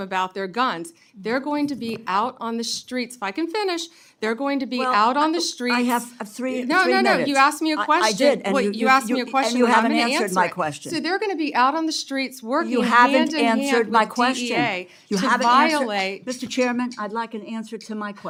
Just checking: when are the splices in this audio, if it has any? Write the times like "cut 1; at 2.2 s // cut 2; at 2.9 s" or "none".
none